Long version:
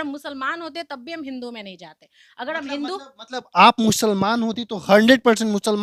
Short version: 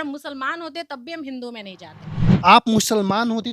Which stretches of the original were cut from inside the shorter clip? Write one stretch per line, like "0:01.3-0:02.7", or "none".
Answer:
0:02.3-0:03.5